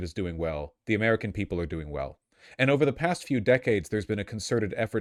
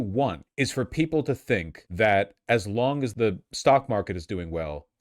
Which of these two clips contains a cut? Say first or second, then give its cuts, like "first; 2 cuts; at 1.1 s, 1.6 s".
second; 2 cuts; at 1.8 s, 3.1 s